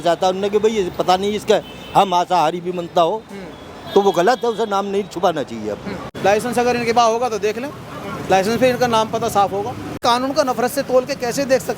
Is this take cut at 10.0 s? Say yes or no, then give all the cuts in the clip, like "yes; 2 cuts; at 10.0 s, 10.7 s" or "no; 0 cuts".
yes; 2 cuts; at 6.0 s, 10.0 s